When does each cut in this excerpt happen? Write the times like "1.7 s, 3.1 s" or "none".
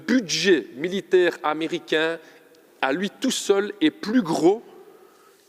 none